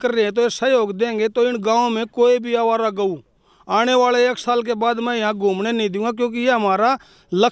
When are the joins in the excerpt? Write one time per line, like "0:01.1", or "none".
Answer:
none